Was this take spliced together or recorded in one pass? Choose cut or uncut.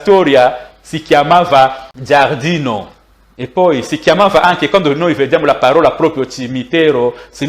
cut